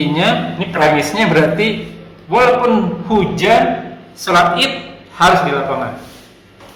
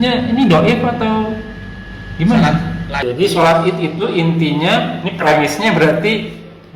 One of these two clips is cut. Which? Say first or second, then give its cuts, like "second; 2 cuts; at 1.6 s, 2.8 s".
second; 1 cut; at 2.9 s